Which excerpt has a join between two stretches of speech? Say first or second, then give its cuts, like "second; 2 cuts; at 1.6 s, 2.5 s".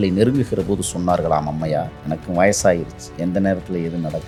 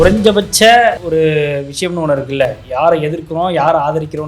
second; 1 cut; at 1.0 s